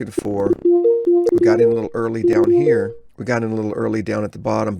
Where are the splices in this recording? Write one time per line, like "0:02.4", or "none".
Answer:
0:03.1